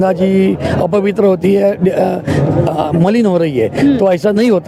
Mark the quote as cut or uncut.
uncut